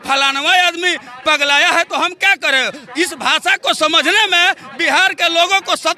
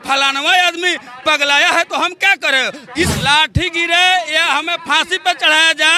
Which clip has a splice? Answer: second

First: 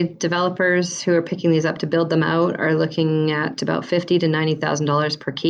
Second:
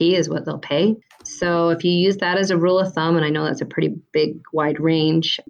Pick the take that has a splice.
second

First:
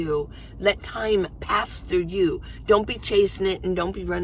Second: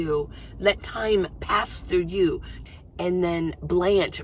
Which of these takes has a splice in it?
second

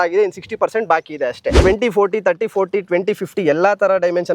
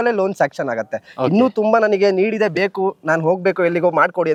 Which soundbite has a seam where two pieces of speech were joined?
first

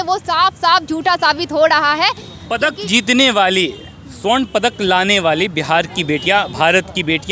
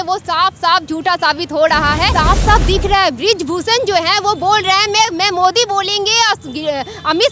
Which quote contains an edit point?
second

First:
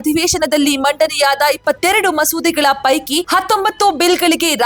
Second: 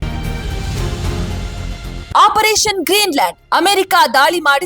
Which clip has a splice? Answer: second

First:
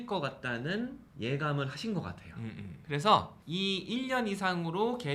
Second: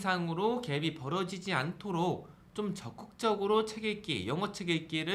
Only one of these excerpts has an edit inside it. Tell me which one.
first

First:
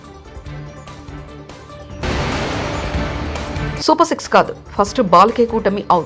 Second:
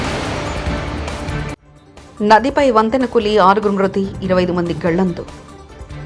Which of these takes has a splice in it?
second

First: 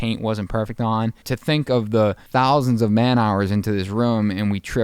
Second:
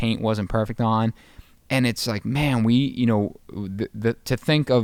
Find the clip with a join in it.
first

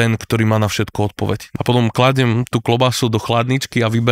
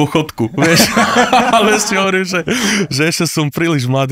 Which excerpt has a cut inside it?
first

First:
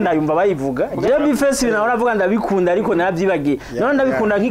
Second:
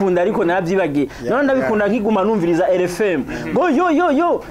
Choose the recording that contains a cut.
first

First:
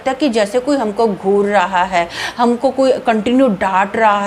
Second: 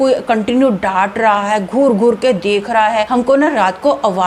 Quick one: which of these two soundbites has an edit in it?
second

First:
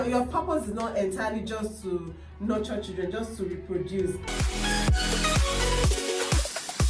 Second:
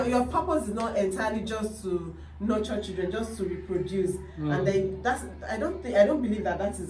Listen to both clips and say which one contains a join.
first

